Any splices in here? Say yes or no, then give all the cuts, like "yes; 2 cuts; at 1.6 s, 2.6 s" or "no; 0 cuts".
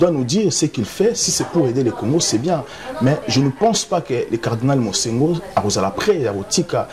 no; 0 cuts